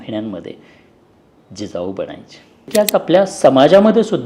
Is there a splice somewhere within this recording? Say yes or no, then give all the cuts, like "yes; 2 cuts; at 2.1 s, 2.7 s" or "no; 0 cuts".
yes; 1 cut; at 2.6 s